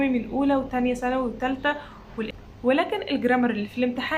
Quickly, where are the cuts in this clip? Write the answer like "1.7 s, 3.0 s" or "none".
2.3 s

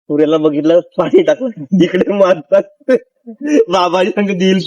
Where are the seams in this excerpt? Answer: none

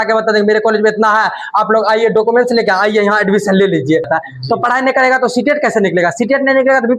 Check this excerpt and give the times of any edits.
4.1 s

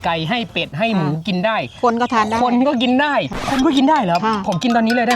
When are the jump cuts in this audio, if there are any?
3.4 s

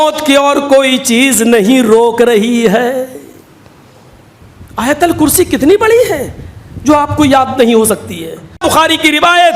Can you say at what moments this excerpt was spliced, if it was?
8.6 s

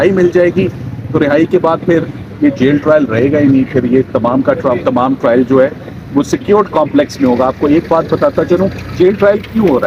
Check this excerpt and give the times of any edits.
none

